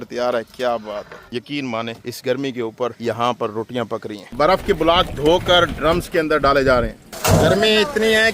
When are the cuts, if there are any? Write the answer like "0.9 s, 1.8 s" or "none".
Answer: 1.3 s, 4.2 s, 7.0 s